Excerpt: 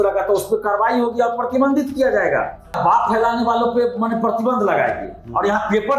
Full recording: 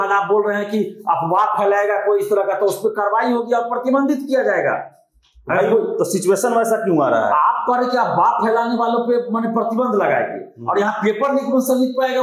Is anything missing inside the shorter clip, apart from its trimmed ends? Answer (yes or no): yes